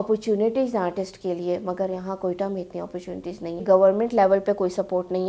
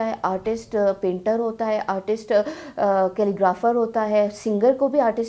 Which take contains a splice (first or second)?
first